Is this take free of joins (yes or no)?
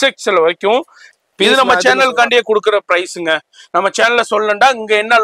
no